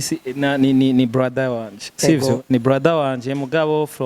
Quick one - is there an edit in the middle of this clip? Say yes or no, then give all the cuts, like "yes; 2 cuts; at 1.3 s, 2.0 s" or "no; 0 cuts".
no; 0 cuts